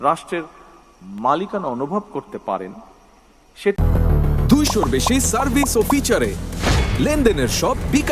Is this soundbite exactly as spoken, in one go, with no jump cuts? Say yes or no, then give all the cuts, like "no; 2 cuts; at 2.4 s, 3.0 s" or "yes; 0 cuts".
no; 1 cut; at 3.8 s